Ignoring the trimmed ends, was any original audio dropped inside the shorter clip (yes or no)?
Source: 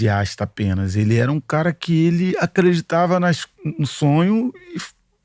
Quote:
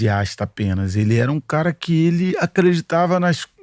no